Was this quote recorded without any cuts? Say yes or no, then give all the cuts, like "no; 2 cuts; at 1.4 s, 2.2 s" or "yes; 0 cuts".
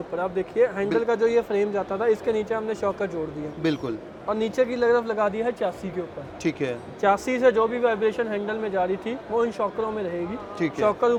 yes; 0 cuts